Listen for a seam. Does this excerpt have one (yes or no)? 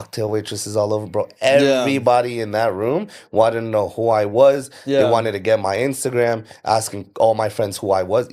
no